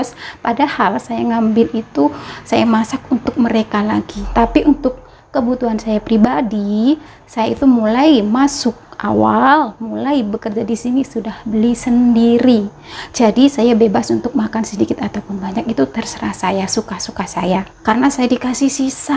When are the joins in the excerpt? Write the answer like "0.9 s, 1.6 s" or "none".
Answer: 4.2 s, 17.7 s